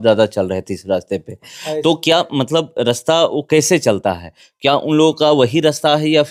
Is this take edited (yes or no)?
no